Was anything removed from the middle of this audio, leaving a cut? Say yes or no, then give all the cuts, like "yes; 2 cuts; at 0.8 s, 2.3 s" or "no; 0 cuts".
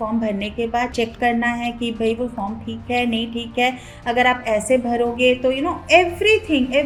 no; 0 cuts